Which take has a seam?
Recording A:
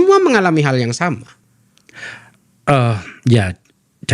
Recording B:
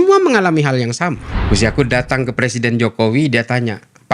B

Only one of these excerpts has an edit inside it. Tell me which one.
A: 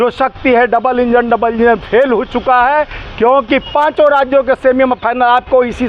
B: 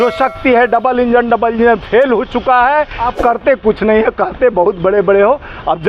B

